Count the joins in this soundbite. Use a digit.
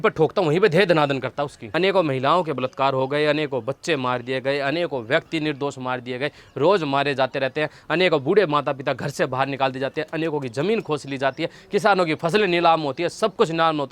1